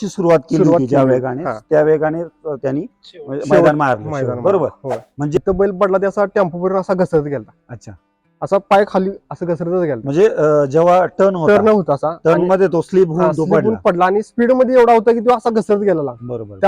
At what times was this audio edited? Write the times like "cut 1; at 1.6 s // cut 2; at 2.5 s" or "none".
cut 1; at 5.4 s